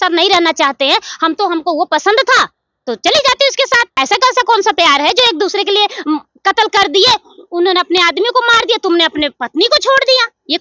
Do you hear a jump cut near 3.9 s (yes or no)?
yes